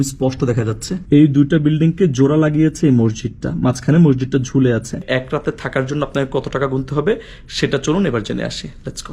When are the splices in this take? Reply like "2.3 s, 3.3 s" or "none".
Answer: 1.0 s, 5.1 s